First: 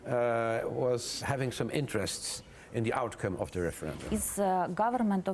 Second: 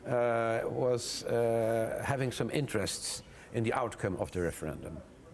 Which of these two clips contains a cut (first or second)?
first